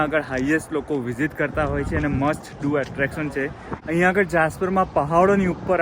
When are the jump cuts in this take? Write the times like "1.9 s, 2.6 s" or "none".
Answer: 3.7 s